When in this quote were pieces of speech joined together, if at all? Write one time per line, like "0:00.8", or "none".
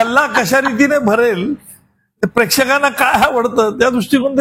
none